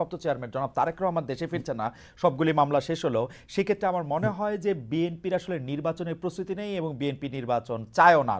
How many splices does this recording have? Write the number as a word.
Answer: zero